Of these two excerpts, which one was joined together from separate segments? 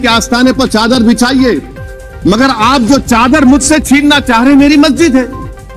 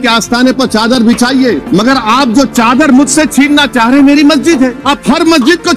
second; 2 cuts; at 1.6 s, 4.8 s

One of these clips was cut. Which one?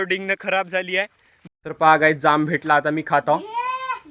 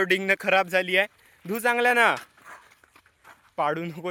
first; 1 cut; at 1.5 s

